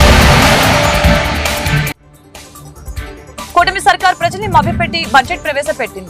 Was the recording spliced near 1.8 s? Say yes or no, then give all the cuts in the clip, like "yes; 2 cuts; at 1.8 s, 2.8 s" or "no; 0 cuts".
no; 1 cut; at 3.1 s